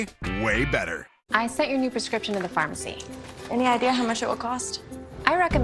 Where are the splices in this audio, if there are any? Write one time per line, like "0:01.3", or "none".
0:01.2